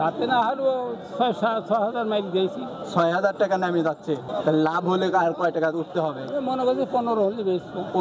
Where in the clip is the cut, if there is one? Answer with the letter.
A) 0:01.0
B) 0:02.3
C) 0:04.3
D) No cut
C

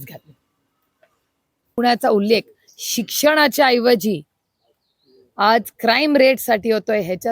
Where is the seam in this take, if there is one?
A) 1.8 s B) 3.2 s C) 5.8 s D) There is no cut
A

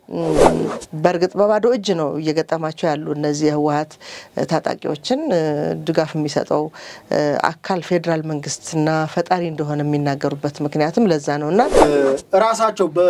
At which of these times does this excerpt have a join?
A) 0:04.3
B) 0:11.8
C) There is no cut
B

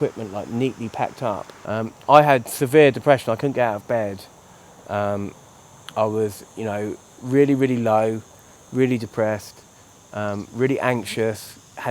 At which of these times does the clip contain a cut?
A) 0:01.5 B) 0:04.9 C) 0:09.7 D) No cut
A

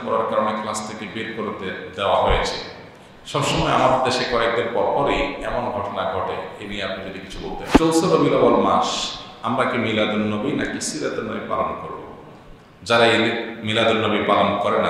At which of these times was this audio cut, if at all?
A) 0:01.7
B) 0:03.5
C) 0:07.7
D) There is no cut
C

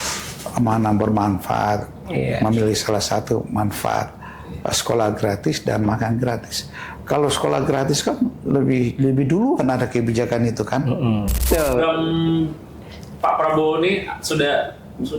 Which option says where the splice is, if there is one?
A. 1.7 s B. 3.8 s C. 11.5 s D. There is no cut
C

